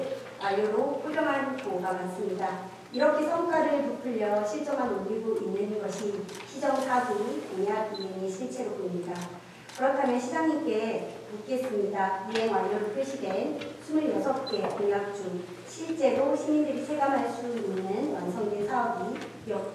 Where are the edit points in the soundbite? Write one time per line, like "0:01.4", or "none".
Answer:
none